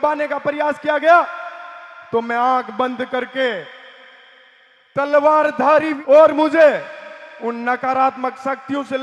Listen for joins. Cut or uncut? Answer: cut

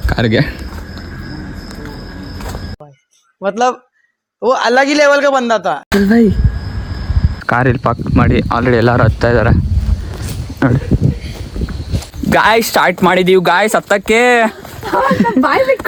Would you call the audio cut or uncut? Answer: uncut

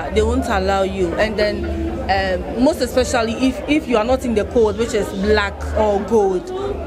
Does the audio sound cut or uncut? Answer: uncut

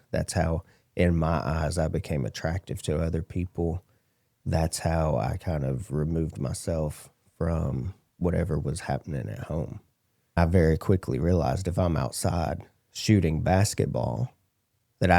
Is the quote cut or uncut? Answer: cut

